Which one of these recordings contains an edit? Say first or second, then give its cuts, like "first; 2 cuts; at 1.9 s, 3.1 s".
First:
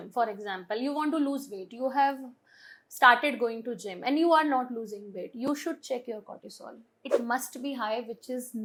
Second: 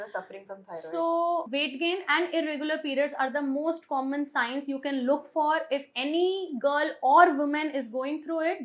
second; 1 cut; at 1.5 s